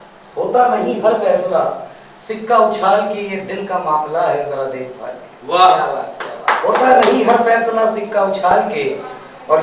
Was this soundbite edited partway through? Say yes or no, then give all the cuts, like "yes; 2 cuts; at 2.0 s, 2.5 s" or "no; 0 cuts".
no; 0 cuts